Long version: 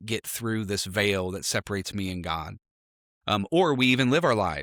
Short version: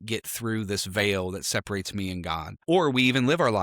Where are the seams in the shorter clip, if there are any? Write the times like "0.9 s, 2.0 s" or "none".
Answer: 2.6 s